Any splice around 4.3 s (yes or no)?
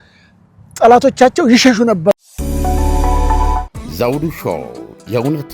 no